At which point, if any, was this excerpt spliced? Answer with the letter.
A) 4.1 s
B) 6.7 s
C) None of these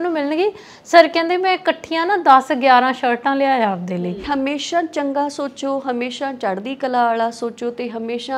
A